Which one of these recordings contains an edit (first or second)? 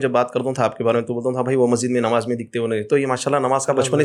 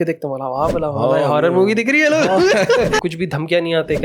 second